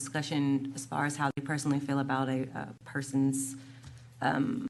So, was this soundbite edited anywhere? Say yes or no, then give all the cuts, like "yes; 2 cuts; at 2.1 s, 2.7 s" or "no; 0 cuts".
no; 0 cuts